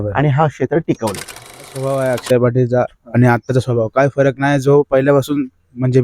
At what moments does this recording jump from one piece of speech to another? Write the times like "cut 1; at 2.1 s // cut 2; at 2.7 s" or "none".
cut 1; at 1.7 s